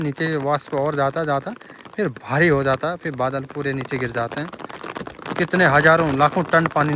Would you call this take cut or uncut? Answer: uncut